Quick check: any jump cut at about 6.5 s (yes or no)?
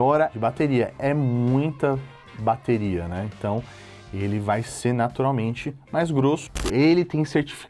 yes